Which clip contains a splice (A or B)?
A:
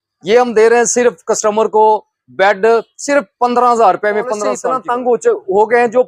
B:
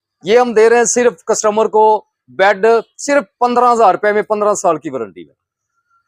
A